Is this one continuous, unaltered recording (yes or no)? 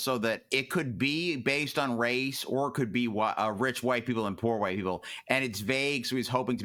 yes